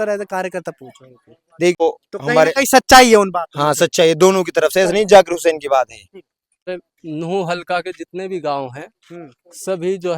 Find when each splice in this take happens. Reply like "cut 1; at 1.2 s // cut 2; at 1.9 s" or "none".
cut 1; at 1.8 s // cut 2; at 6.7 s